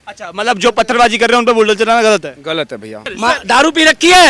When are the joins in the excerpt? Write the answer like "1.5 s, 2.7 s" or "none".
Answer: 3.2 s